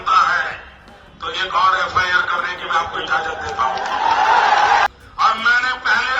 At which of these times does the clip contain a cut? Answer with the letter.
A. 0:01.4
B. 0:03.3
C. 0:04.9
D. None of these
C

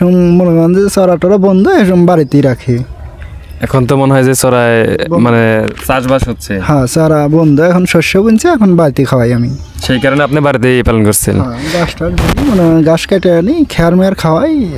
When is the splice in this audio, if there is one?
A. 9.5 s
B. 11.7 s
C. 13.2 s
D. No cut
D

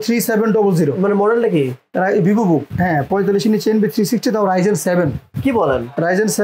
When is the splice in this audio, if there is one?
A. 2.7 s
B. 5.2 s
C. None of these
A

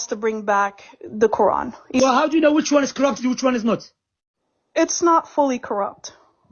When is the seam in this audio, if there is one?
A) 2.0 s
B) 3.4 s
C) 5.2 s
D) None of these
A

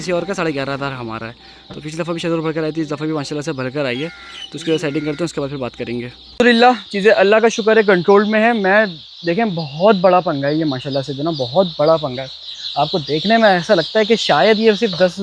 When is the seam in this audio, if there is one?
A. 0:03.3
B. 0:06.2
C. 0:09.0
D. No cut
B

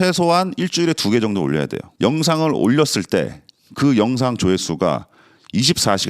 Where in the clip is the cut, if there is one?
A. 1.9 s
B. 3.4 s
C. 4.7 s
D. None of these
A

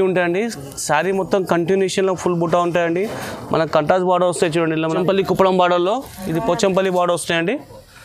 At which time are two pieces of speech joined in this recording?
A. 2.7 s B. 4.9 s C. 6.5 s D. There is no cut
B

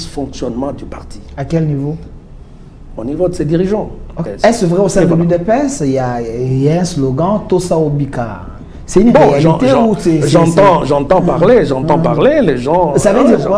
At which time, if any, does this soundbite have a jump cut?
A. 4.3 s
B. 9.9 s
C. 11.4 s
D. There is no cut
A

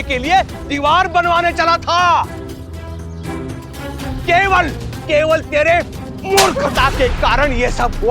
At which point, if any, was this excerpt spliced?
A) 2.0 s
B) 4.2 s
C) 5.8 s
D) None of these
B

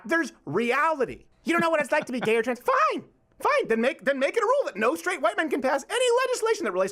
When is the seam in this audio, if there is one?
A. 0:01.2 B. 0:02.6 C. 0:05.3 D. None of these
A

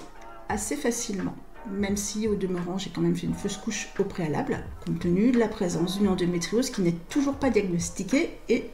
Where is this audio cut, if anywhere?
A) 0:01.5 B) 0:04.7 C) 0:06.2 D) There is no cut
B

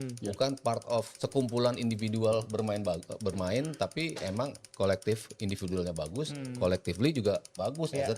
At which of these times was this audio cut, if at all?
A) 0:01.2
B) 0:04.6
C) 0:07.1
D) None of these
A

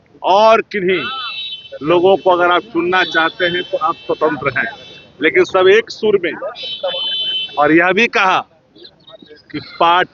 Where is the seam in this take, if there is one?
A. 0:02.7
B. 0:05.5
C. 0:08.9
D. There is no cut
D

